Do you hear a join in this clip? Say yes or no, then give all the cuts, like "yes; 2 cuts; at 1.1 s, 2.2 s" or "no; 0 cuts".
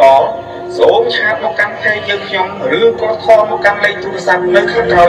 no; 0 cuts